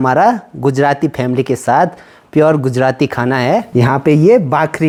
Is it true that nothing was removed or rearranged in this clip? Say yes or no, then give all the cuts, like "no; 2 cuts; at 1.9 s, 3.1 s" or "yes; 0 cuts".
yes; 0 cuts